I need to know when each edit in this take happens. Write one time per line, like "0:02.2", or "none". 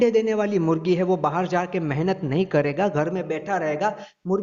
none